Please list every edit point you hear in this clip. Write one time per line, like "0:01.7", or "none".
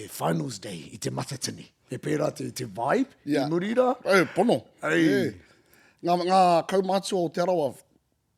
none